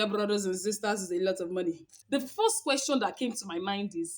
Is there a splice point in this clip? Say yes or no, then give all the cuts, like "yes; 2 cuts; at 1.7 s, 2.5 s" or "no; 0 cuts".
yes; 1 cut; at 1.9 s